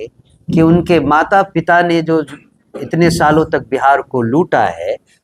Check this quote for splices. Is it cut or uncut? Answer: uncut